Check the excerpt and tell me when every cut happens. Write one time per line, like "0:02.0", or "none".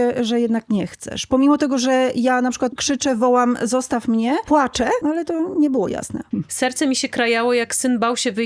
0:02.7
0:04.6
0:06.2